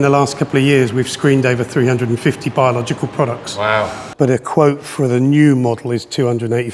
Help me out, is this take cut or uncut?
cut